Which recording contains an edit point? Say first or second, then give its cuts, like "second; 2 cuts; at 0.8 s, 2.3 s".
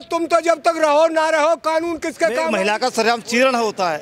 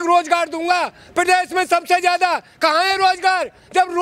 first; 1 cut; at 2.5 s